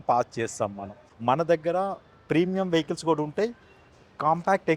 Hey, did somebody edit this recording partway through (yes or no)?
yes